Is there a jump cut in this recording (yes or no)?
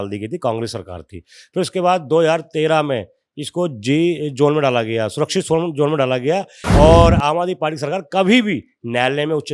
yes